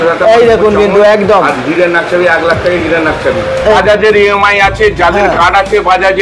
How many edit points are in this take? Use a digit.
1